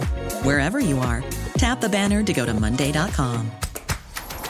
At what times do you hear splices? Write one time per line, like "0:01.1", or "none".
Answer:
none